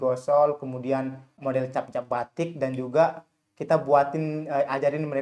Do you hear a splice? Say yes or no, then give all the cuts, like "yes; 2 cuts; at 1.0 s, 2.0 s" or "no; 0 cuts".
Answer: yes; 1 cut; at 1.4 s